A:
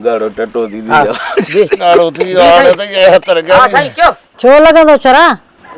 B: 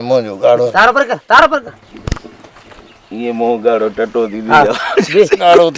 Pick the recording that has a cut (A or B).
A